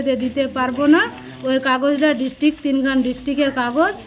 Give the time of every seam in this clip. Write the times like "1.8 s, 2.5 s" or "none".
none